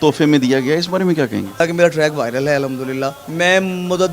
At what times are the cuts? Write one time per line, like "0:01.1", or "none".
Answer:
0:01.6
0:03.2